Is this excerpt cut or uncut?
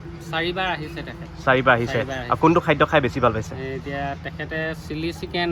uncut